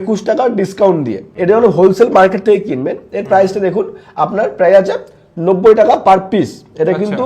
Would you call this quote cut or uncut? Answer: cut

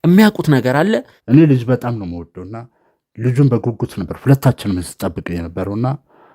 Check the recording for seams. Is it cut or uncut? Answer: cut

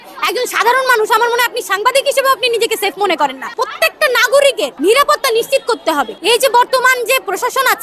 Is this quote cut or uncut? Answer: uncut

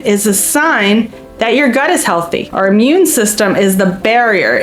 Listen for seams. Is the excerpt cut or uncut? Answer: cut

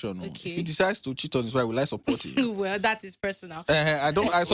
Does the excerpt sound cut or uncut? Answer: uncut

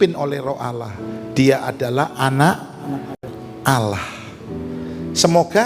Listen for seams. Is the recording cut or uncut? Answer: uncut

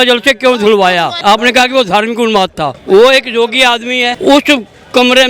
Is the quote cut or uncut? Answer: cut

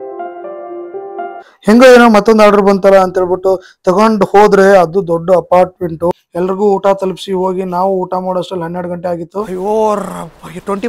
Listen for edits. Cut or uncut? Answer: cut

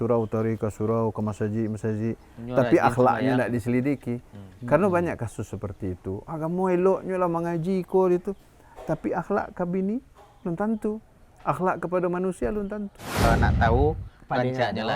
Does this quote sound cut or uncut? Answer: cut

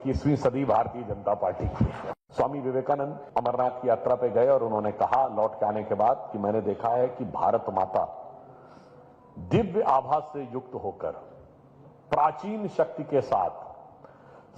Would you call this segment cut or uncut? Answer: cut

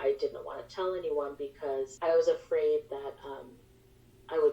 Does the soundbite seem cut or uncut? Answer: cut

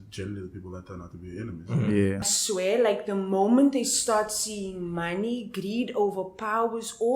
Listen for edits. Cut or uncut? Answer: cut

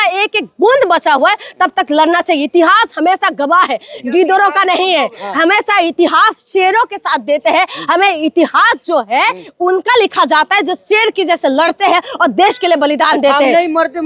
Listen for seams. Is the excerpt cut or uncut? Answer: uncut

